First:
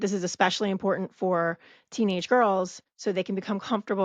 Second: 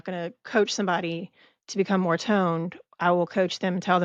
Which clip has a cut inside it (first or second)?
first